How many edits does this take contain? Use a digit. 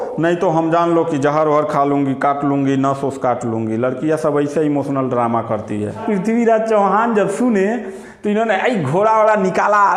1